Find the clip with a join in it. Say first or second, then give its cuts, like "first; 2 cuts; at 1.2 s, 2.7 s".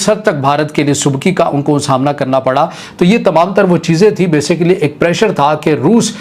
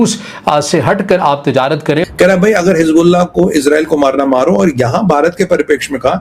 second; 1 cut; at 2.1 s